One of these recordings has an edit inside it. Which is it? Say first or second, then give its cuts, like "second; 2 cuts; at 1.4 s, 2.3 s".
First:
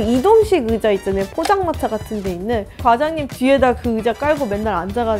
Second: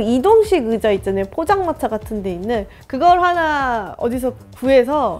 first; 1 cut; at 2.8 s